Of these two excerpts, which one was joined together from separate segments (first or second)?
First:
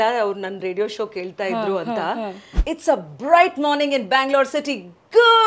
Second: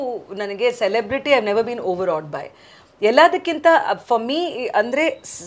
first